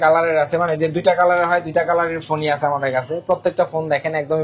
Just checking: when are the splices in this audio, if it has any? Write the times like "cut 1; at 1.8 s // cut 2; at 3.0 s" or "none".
none